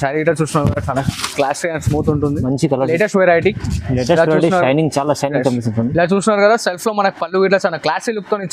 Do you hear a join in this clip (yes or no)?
yes